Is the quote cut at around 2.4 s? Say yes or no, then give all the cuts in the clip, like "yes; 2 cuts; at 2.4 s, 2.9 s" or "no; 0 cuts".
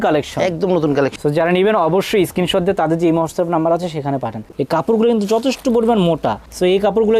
no; 2 cuts; at 1.1 s, 4.4 s